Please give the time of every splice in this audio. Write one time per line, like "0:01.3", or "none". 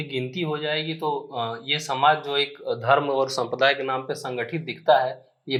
none